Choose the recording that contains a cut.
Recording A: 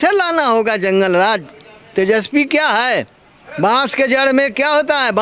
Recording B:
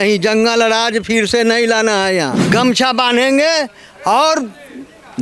B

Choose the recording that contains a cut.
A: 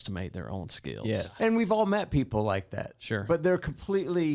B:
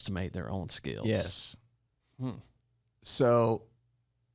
A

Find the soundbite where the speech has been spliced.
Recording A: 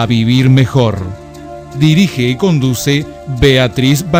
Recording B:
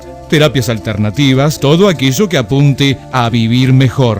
B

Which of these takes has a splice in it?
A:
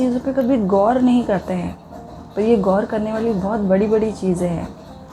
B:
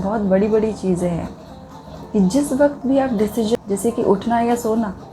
B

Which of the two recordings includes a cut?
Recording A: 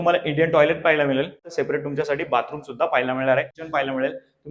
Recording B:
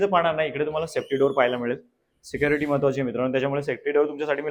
A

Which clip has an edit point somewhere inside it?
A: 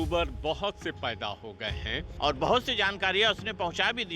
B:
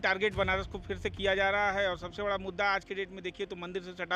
A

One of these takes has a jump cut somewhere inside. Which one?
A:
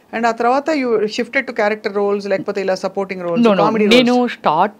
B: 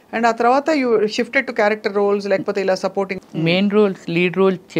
B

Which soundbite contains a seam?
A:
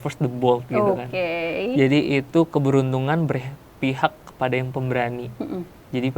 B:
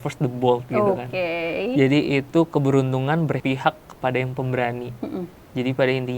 B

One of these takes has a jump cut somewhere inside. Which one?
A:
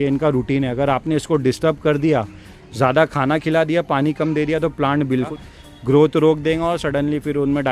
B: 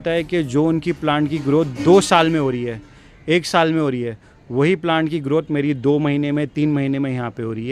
A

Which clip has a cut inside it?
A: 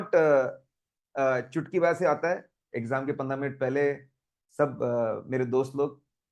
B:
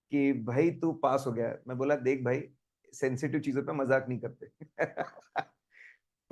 A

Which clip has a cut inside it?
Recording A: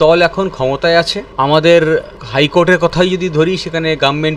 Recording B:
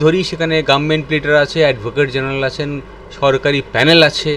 A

